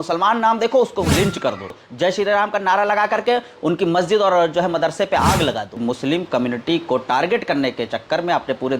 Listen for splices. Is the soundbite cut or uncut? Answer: cut